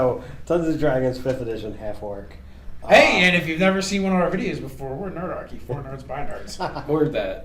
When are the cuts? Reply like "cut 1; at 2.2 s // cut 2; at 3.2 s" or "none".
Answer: cut 1; at 2.5 s

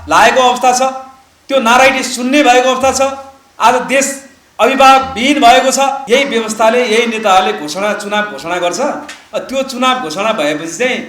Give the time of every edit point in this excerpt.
cut 1; at 6.0 s

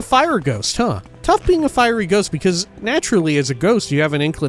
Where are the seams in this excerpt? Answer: cut 1; at 1.1 s // cut 2; at 2.7 s

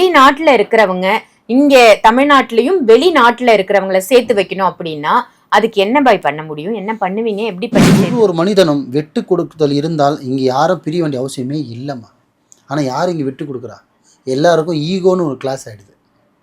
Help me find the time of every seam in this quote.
cut 1; at 8.1 s

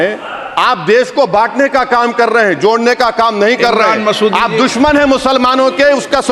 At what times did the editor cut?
none

